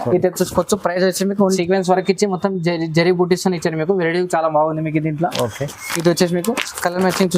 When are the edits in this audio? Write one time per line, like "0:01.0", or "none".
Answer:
0:01.6